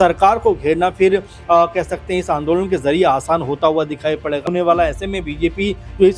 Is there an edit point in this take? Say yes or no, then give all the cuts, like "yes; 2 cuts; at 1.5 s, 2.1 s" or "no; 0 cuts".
yes; 1 cut; at 4.5 s